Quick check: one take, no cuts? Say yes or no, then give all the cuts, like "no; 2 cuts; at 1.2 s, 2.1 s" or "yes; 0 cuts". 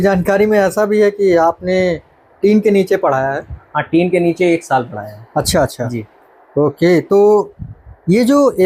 yes; 0 cuts